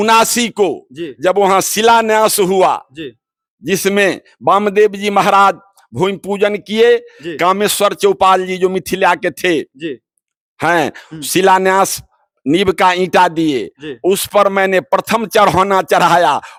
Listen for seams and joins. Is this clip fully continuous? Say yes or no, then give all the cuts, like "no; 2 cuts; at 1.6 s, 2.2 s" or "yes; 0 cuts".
yes; 0 cuts